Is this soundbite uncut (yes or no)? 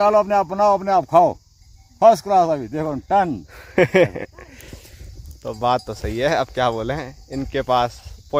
yes